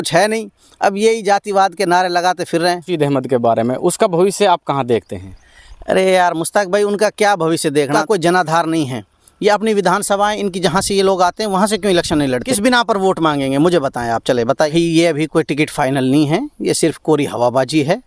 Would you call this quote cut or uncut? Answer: cut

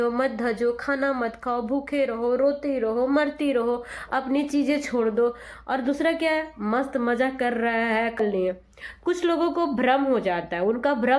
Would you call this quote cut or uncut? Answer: cut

